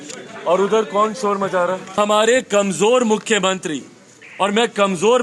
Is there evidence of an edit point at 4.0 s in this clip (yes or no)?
no